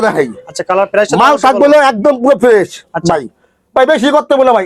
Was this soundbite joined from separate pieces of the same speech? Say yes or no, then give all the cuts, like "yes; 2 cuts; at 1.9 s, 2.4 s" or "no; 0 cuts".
no; 0 cuts